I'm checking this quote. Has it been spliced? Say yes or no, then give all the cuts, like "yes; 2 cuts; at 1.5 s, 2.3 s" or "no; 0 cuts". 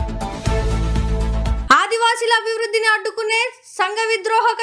no; 0 cuts